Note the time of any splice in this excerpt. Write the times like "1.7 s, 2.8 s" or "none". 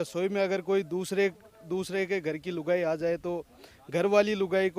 none